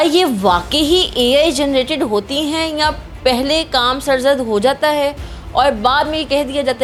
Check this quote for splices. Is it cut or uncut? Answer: uncut